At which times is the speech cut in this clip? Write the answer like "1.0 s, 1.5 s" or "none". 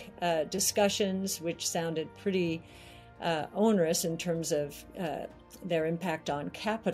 none